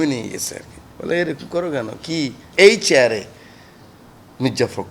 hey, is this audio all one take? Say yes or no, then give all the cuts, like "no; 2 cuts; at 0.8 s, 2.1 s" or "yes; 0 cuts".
no; 1 cut; at 2.4 s